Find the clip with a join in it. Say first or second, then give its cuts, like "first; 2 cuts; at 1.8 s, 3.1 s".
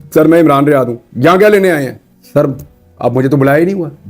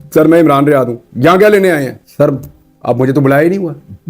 second; 1 cut; at 2.0 s